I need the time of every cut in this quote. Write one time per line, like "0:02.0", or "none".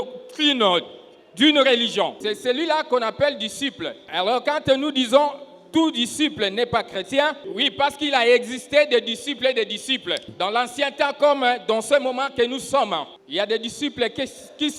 0:02.3
0:04.0
0:07.4
0:10.2
0:13.1